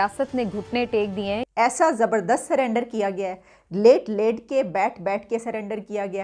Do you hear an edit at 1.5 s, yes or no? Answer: yes